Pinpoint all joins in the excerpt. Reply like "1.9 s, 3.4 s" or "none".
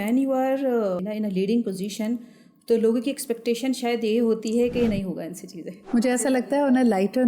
1.0 s, 5.9 s